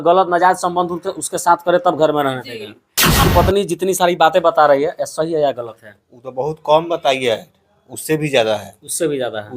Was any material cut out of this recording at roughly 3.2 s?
yes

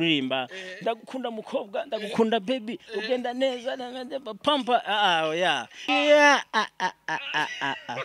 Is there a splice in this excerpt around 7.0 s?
no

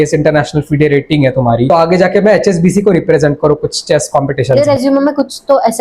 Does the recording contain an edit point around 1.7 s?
yes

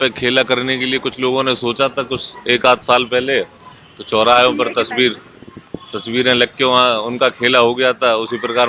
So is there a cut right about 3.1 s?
no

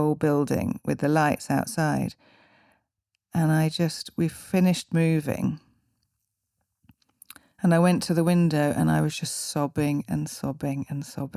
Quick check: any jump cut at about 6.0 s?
no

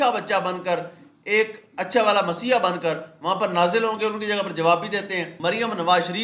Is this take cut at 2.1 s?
no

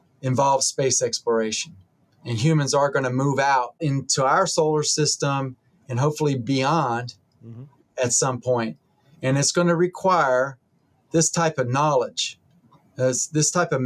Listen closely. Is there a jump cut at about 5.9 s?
no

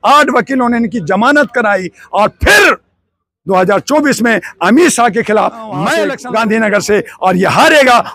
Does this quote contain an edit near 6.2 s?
yes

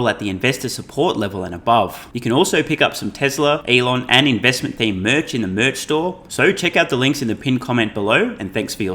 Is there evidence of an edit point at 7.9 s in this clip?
no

